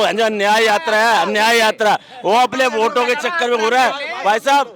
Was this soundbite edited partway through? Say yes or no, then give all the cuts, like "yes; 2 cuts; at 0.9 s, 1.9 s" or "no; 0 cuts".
no; 0 cuts